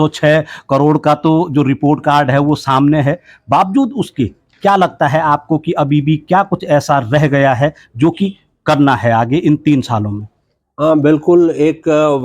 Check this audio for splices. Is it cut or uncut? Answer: uncut